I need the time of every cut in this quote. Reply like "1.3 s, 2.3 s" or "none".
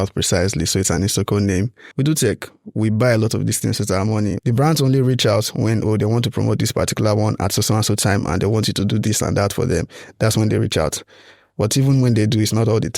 1.8 s, 4.4 s